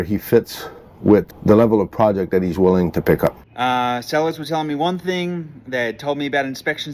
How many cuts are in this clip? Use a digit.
2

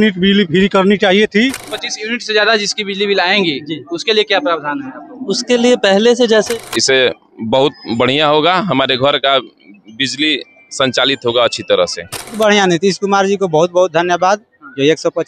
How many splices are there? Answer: 3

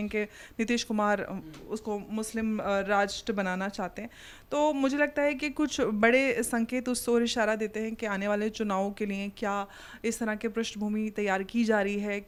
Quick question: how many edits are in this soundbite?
0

